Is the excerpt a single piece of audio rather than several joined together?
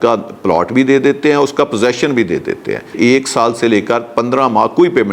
no; 1 cut; at 3.0 s

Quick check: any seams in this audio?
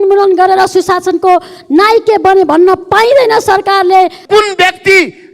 yes; 1 cut; at 4.2 s

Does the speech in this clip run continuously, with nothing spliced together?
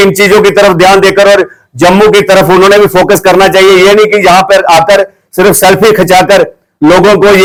yes; 0 cuts

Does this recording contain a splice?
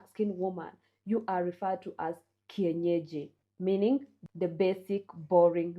yes; 1 cut; at 4.1 s

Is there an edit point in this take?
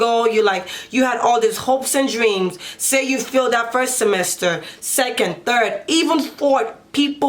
no; 0 cuts

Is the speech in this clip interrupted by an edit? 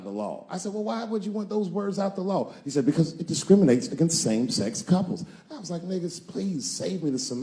no; 0 cuts

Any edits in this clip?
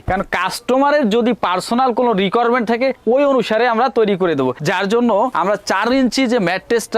no; 0 cuts

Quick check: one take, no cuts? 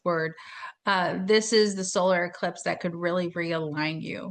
yes; 0 cuts

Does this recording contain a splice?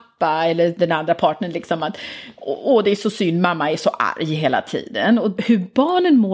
yes; 1 cut; at 5.4 s

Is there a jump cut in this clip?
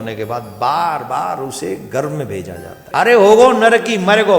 yes; 1 cut; at 2.8 s

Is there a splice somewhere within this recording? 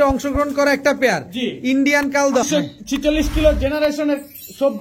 yes; 1 cut; at 2.5 s

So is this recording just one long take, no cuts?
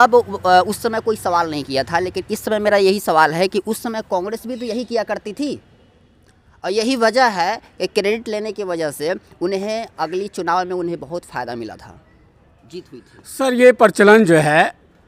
yes; 0 cuts

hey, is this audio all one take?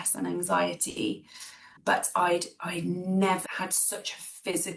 no; 1 cut; at 3.4 s

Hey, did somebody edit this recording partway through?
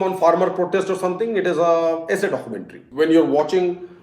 no; 0 cuts

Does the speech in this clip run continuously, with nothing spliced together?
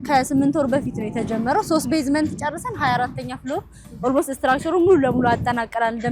yes; 0 cuts

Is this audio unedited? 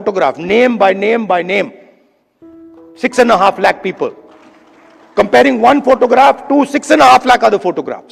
yes; 0 cuts

